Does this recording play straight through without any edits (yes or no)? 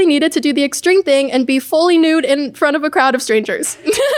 yes